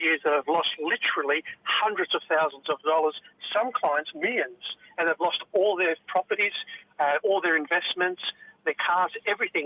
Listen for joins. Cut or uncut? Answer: uncut